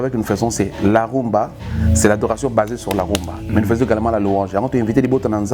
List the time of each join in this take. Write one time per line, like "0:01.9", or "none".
0:03.6